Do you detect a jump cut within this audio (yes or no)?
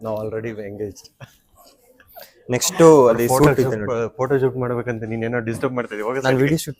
no